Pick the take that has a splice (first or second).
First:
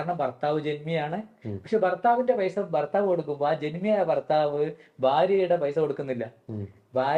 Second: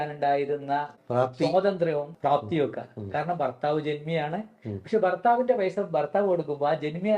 second